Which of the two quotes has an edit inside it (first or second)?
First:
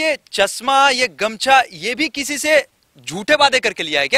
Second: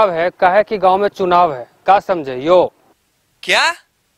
second